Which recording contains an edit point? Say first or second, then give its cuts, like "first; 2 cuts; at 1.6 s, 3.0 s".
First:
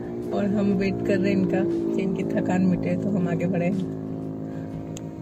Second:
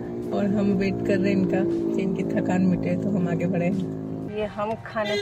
second; 1 cut; at 4.3 s